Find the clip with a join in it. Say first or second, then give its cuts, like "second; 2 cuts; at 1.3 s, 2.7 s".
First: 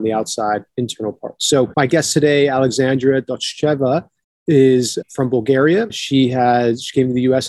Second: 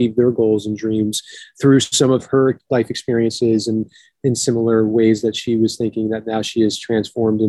first; 3 cuts; at 1.7 s, 5.0 s, 6.0 s